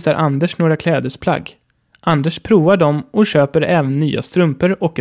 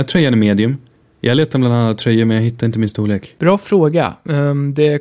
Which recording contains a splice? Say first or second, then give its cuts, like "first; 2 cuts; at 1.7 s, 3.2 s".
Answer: second; 2 cuts; at 0.8 s, 3.3 s